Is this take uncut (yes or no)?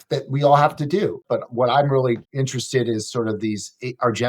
no